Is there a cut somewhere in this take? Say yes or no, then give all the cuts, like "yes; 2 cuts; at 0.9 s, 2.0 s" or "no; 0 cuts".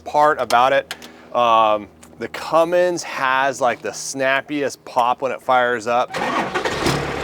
yes; 1 cut; at 6.1 s